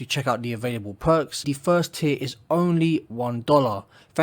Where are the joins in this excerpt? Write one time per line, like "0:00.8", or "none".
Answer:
0:01.4